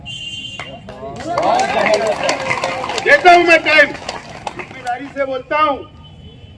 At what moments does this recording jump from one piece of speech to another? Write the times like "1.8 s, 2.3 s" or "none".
4.8 s